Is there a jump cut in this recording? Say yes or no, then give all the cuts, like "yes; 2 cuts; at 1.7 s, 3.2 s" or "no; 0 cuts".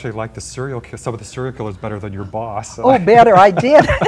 no; 0 cuts